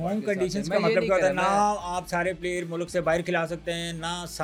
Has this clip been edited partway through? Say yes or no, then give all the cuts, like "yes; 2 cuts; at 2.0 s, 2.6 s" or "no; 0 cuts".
no; 0 cuts